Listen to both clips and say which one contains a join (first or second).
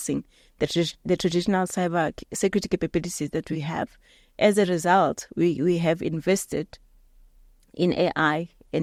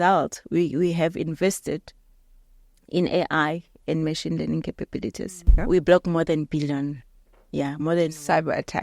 second